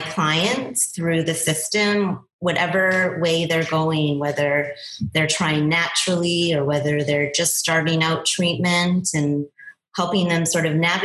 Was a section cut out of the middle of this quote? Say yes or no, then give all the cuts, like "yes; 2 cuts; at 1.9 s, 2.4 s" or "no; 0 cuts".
no; 0 cuts